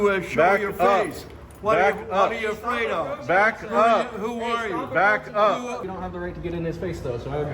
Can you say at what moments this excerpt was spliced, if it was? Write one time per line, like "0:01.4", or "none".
0:05.8